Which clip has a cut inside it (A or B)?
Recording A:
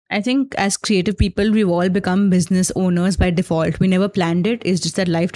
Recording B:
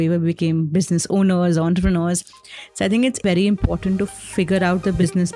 B